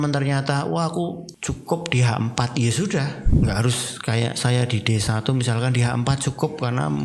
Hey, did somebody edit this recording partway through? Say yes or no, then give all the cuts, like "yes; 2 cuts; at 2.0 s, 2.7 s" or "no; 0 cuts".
yes; 2 cuts; at 1.3 s, 3.2 s